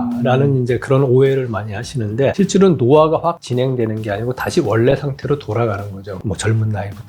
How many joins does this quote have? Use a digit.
1